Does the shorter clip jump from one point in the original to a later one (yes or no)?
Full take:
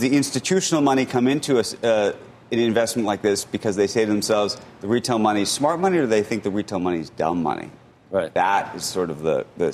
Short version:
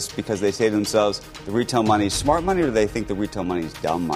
no